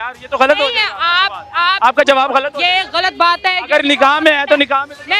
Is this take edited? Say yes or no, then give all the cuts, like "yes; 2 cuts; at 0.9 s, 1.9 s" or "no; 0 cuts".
no; 0 cuts